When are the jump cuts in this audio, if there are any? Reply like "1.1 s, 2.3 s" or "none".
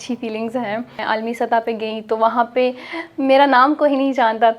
1.0 s